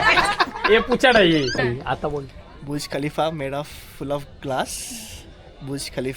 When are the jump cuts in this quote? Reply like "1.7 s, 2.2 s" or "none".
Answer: 1.5 s